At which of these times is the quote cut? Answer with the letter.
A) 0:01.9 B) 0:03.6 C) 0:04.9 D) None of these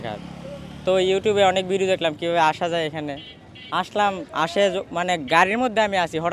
D